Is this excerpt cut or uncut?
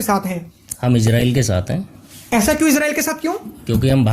uncut